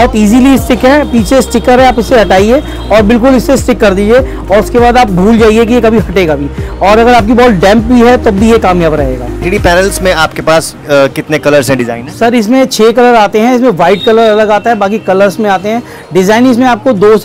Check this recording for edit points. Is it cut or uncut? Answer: cut